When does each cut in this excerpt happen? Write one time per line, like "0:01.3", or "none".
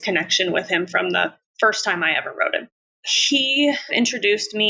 0:03.1
0:03.9